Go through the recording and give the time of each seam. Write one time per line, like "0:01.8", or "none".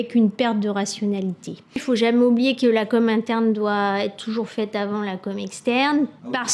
0:01.8